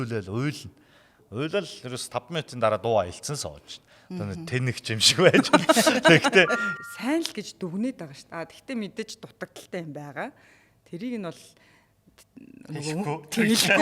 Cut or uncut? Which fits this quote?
cut